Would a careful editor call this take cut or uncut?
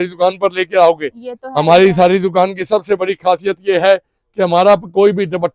uncut